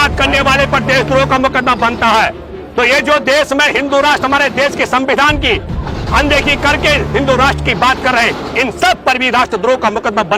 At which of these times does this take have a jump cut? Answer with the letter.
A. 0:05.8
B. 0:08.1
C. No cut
C